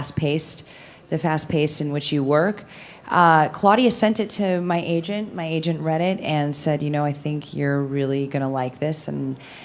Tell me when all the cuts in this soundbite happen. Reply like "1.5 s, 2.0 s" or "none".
7.9 s